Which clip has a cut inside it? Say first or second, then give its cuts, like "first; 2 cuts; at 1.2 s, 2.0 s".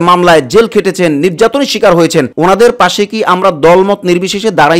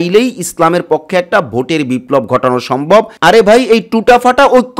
second; 1 cut; at 3.1 s